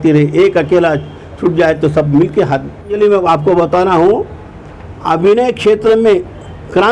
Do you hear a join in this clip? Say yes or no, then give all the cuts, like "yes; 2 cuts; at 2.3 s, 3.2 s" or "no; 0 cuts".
yes; 1 cut; at 3.0 s